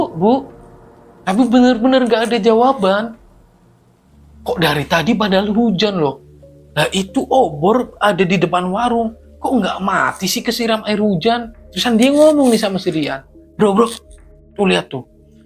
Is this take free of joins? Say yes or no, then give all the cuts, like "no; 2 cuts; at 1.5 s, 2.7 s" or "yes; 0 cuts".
yes; 0 cuts